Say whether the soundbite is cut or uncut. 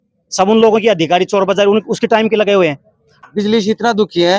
cut